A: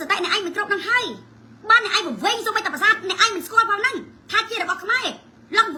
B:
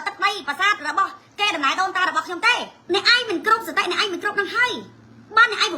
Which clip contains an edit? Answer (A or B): B